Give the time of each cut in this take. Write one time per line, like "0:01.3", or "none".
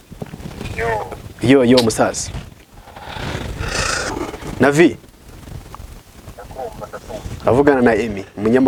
none

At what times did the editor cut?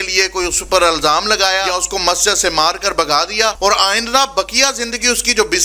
0:01.7
0:03.6

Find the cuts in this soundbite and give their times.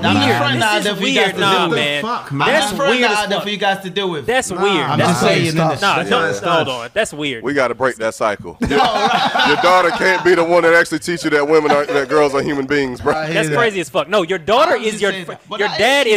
0:08.5
0:13.2

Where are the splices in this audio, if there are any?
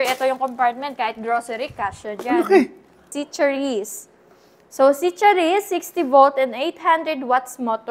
0:03.2

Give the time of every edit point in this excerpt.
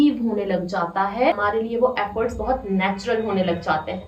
0:01.3

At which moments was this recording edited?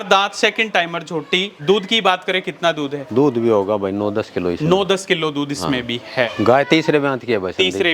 0:01.5
0:06.3

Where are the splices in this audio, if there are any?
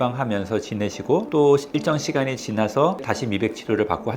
0:01.3
0:03.0

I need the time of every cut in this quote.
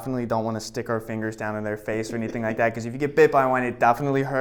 none

